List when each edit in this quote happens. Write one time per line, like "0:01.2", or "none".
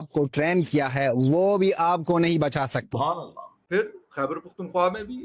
0:02.9